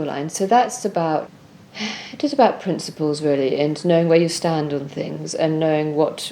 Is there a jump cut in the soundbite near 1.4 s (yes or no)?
yes